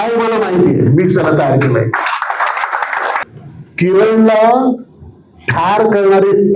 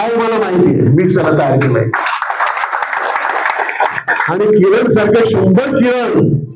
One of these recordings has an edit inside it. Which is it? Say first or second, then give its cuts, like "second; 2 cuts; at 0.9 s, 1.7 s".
first; 1 cut; at 3.2 s